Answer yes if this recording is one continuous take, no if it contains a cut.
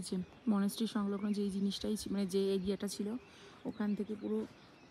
yes